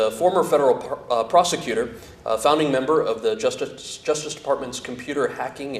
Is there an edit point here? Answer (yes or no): no